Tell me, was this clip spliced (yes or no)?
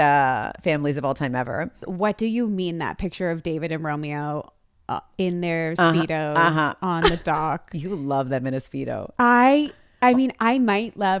yes